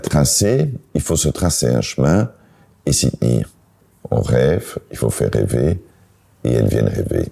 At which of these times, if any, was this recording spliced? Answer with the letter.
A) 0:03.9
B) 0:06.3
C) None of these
A